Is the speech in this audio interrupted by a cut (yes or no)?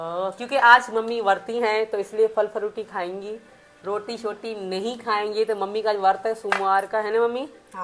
no